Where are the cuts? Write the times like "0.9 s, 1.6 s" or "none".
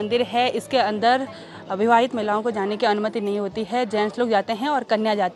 none